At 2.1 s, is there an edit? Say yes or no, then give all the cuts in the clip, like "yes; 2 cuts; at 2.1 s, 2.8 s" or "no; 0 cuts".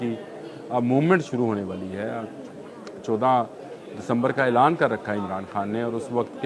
no; 0 cuts